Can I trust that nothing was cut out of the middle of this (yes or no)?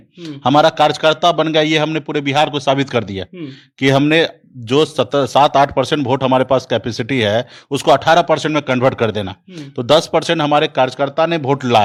yes